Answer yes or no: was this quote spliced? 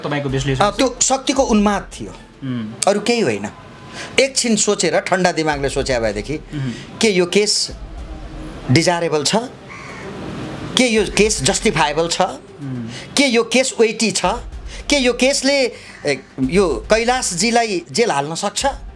no